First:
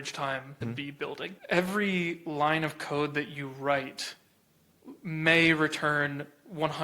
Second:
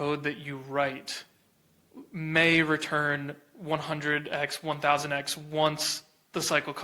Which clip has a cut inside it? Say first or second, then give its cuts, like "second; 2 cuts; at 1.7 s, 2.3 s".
first; 1 cut; at 1.4 s